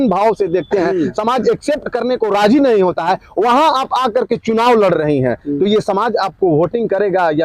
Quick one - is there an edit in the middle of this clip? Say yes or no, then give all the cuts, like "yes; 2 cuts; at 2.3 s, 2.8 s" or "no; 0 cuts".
no; 0 cuts